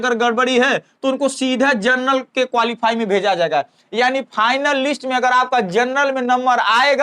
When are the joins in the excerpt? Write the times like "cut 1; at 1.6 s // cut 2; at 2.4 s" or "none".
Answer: none